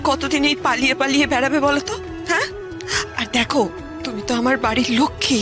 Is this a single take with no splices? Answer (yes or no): yes